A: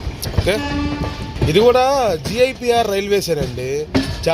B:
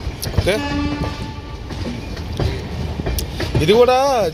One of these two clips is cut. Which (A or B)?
A